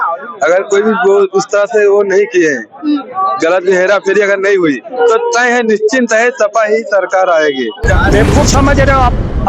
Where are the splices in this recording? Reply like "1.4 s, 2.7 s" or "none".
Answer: 7.9 s

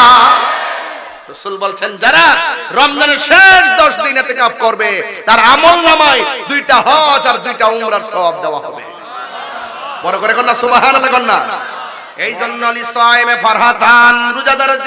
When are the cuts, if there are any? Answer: 12.1 s

